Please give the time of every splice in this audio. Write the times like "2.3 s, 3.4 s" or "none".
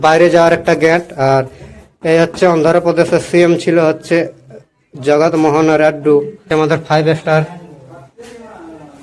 6.4 s